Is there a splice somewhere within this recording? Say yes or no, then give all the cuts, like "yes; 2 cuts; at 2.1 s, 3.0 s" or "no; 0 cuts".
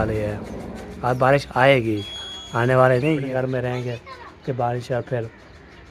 yes; 1 cut; at 3.2 s